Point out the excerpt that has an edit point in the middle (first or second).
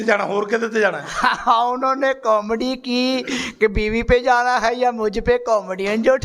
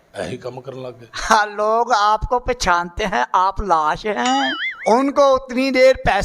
second